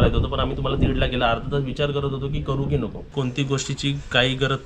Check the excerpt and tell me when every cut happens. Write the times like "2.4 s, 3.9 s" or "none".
3.1 s